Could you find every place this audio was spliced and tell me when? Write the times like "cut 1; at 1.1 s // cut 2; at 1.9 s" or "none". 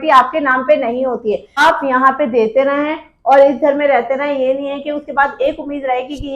cut 1; at 1.6 s